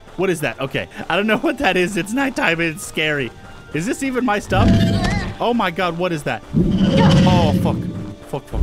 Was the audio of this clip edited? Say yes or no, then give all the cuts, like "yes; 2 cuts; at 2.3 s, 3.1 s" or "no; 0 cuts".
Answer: yes; 1 cut; at 0.9 s